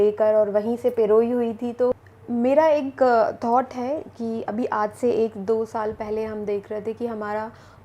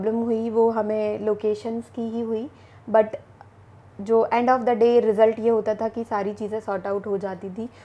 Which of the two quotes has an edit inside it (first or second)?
first